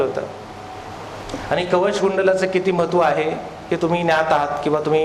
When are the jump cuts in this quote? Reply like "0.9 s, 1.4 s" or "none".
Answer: none